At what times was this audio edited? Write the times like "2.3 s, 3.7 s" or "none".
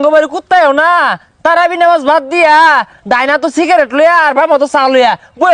none